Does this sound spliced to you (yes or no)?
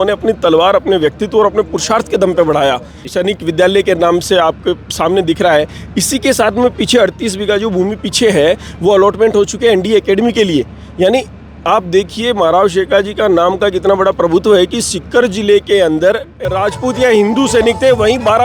yes